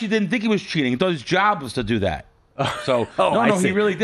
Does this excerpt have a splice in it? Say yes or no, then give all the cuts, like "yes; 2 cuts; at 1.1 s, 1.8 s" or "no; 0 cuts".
no; 0 cuts